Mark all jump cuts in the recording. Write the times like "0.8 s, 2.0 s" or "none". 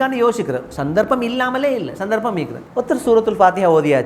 2.6 s

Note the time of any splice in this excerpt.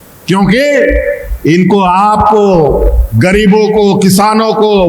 none

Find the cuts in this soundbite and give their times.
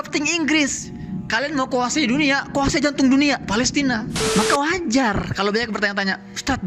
4.2 s

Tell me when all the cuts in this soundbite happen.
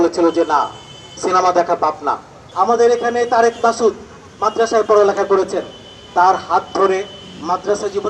2.4 s

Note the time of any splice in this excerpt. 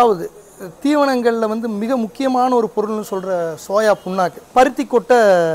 4.4 s

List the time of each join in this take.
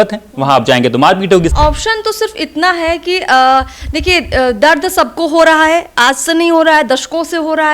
1.5 s

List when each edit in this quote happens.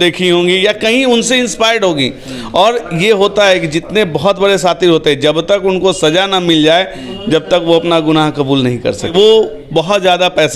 9.1 s

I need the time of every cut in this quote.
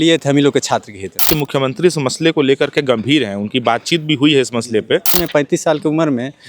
1.3 s, 5.2 s

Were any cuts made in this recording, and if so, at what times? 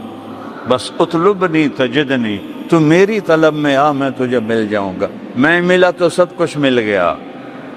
none

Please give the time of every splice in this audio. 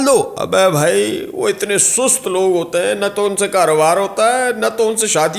none

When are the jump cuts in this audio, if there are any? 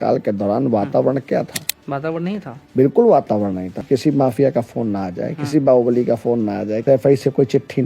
3.7 s, 6.8 s

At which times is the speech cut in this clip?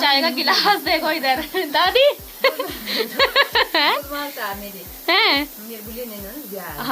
none

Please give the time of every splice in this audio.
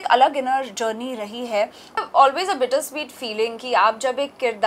1.9 s

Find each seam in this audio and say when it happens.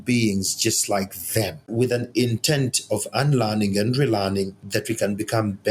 1.7 s

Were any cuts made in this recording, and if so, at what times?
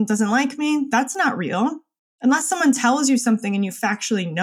none

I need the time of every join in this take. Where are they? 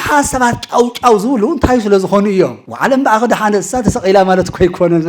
2.6 s

